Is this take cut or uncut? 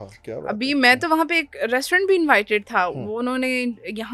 uncut